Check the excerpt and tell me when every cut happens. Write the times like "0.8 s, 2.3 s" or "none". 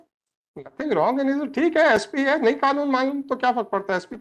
none